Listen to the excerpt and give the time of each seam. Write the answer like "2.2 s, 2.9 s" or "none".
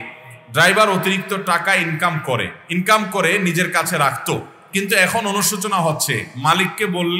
2.6 s